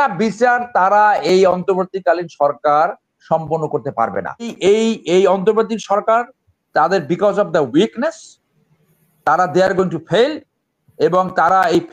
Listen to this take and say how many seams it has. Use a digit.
1